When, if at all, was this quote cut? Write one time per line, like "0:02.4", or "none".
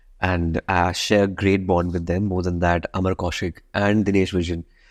none